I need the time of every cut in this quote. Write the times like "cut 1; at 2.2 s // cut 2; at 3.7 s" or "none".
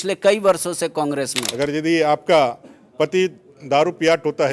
cut 1; at 1.4 s